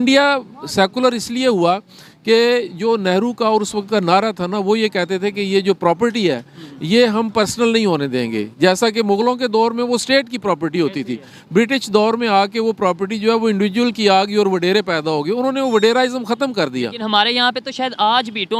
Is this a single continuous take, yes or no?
yes